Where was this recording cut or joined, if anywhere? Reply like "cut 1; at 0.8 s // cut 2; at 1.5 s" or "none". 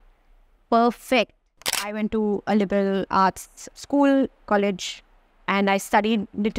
cut 1; at 1.7 s // cut 2; at 3.3 s // cut 3; at 4.4 s